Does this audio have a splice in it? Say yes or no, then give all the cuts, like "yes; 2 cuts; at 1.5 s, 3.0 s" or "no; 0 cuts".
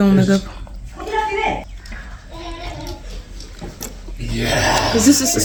no; 0 cuts